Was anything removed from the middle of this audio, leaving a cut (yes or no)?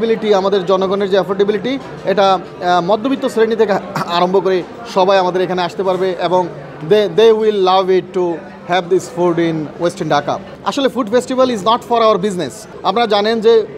yes